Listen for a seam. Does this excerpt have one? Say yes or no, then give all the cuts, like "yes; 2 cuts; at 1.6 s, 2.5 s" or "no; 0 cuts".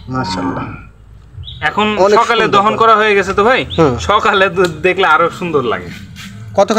no; 0 cuts